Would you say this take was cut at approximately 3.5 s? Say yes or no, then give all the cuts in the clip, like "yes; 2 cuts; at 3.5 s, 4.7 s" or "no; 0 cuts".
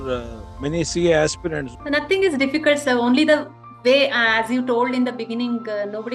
no; 1 cut; at 1.7 s